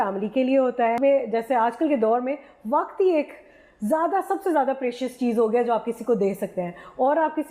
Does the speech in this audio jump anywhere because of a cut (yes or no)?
yes